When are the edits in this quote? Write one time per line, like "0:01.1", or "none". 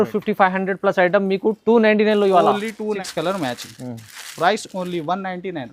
0:03.0